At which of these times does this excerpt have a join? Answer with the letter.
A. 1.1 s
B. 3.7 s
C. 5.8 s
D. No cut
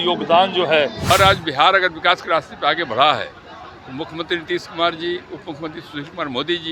A